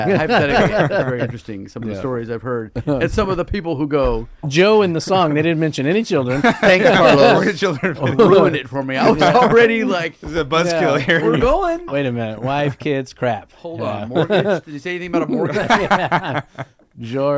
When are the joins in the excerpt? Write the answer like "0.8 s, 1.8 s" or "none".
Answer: 4.5 s, 11.9 s